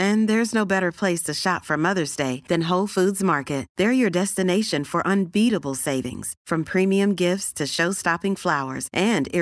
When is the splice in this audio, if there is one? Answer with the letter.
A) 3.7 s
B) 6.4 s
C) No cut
C